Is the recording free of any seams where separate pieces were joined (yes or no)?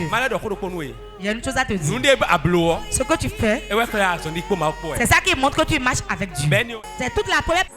no